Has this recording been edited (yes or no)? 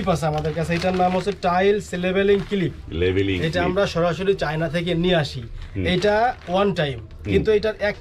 no